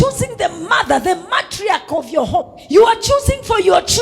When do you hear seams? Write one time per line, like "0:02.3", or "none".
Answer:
0:02.6